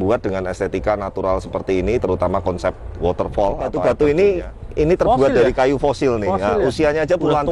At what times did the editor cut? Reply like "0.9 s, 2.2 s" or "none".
3.8 s